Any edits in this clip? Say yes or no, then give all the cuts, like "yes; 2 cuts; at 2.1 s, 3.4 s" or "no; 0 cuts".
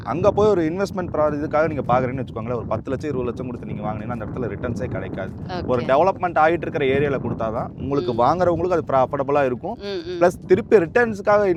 no; 0 cuts